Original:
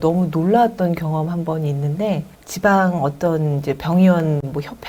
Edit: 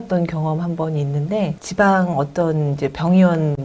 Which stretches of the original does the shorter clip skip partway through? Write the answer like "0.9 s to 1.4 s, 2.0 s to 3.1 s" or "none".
2.3 s to 2.5 s